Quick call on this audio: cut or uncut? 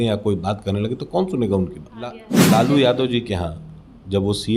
cut